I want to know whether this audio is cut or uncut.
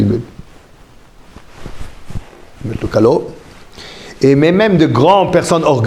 uncut